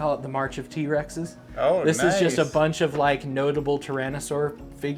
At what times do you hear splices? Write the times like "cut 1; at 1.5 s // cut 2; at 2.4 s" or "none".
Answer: none